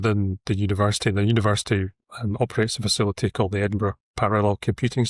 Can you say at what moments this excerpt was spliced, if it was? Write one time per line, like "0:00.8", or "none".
none